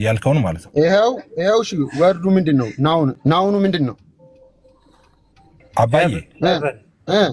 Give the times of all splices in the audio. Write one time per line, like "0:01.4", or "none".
0:03.2